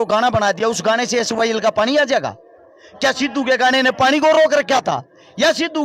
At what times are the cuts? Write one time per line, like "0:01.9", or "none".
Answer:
none